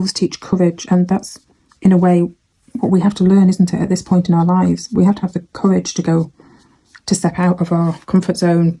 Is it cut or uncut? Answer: uncut